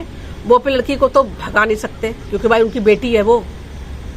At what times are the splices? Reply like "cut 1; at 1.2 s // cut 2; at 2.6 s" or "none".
none

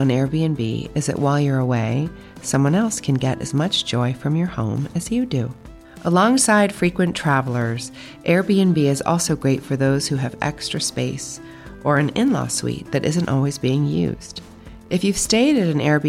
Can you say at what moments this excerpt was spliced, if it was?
none

